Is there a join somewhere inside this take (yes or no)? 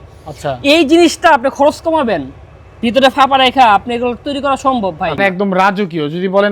yes